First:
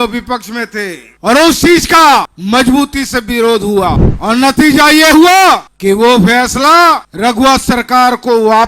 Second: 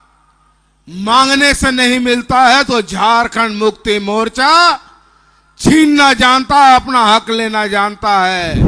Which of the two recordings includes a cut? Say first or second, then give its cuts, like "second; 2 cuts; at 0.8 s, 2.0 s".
first; 5 cuts; at 1.0 s, 2.3 s, 4.1 s, 5.7 s, 7.1 s